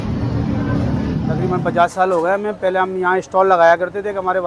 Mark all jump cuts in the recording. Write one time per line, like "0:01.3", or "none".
0:01.5